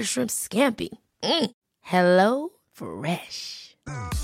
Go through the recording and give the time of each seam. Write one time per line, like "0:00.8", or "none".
none